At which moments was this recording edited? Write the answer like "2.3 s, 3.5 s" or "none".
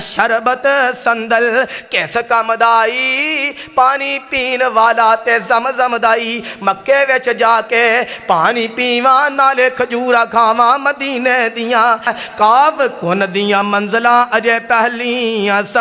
12.1 s